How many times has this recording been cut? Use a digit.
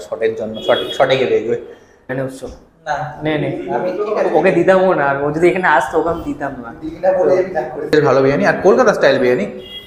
2